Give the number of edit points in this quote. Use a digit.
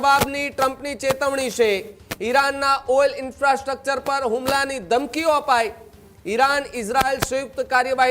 0